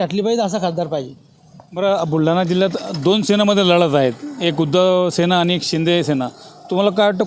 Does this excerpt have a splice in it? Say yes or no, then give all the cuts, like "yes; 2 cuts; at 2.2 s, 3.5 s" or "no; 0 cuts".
no; 0 cuts